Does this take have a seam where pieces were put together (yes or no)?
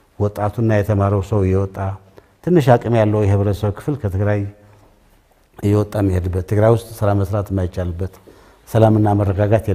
no